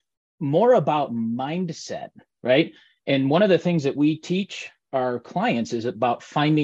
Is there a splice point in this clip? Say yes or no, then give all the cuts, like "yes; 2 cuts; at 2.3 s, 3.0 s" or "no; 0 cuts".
no; 0 cuts